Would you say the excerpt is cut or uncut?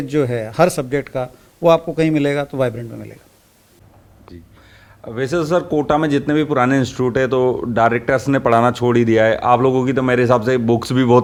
uncut